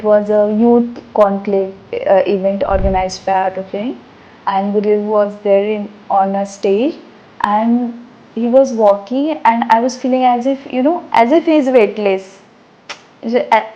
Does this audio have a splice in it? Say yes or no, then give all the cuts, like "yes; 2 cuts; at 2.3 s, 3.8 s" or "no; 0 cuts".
no; 0 cuts